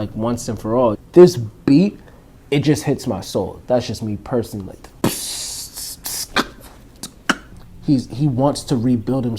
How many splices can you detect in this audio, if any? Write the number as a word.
two